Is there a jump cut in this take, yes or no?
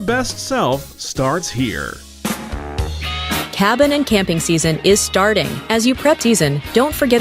yes